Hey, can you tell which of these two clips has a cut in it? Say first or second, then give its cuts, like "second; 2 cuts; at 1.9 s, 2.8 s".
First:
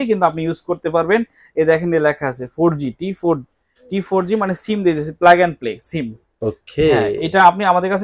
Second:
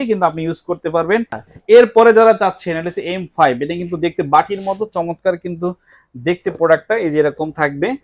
second; 1 cut; at 1.4 s